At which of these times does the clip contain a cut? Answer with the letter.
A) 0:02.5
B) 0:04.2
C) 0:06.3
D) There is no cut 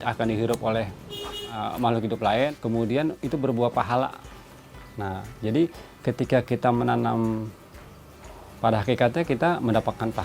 A